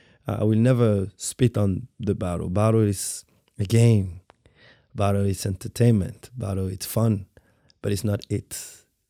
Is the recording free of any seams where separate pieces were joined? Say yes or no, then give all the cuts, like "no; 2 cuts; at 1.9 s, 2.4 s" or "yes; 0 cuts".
yes; 0 cuts